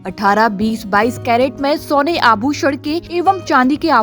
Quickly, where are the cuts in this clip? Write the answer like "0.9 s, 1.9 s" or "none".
3.0 s